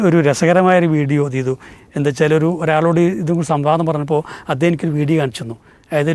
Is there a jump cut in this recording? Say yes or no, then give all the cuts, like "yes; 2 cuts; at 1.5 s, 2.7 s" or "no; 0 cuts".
no; 0 cuts